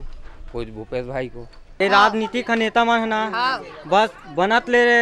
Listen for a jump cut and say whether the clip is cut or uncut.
cut